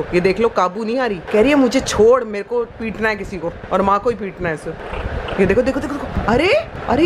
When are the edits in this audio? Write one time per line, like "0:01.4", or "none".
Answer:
0:01.2
0:06.1